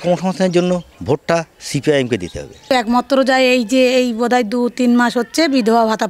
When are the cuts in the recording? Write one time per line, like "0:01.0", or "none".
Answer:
0:02.7